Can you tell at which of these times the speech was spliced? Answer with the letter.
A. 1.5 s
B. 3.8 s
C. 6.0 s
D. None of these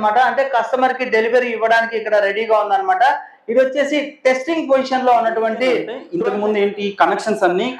C